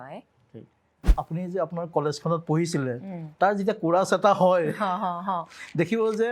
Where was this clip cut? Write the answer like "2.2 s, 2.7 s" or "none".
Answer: 1.0 s